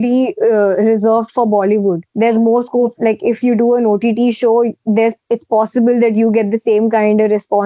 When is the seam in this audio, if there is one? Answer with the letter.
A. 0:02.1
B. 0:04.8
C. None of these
A